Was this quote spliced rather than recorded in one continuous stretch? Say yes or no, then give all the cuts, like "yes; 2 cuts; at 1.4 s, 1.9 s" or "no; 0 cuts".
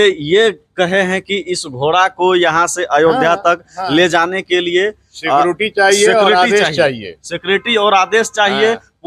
no; 0 cuts